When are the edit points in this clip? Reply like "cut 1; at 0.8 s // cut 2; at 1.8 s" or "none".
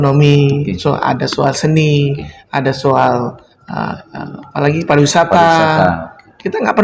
none